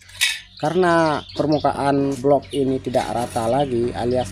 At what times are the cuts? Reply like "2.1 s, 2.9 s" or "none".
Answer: 2.1 s